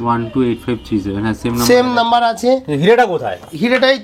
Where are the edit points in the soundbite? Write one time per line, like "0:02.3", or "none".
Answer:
none

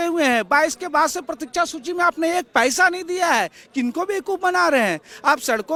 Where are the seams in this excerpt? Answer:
none

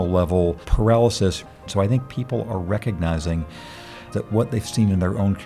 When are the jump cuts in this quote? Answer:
0:01.5

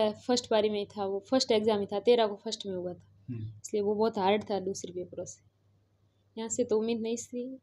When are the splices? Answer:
none

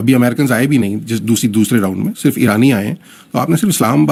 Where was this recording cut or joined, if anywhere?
none

